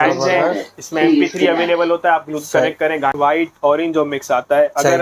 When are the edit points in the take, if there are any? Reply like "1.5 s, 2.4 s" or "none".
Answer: 3.1 s